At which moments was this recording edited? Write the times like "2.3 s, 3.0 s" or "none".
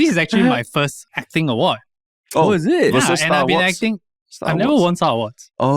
1.0 s